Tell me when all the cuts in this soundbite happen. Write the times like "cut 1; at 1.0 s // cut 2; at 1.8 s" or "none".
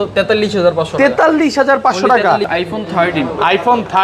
cut 1; at 2.5 s